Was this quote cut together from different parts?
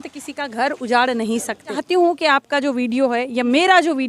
yes; 1 cut; at 1.8 s

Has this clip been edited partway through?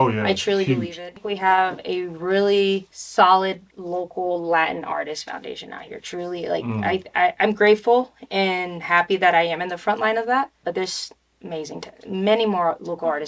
yes; 3 cuts; at 1.0 s, 3.0 s, 3.7 s

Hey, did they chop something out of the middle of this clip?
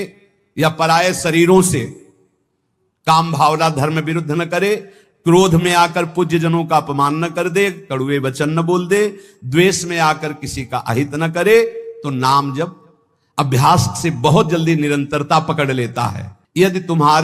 no; 0 cuts

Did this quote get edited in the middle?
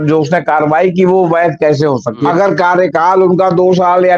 yes; 1 cut; at 2.2 s

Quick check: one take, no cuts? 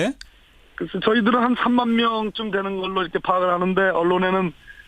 no; 1 cut; at 1.0 s

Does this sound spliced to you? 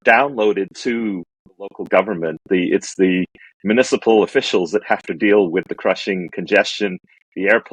no; 0 cuts

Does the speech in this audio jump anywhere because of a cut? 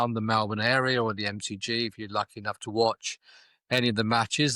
no; 0 cuts

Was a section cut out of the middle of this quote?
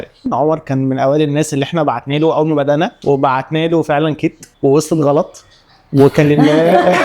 yes; 1 cut; at 3.0 s

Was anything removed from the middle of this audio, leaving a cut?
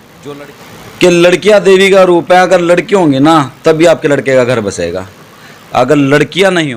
no; 0 cuts

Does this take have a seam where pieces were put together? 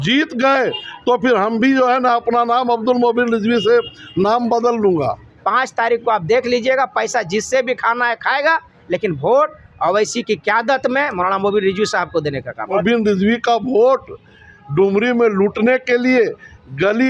yes; 2 cuts; at 5.3 s, 12.8 s

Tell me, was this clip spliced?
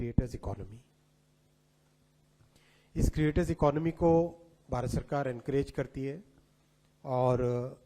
no; 0 cuts

